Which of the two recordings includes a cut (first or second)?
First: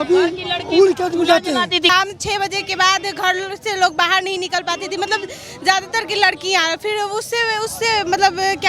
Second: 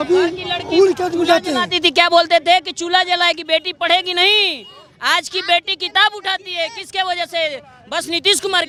first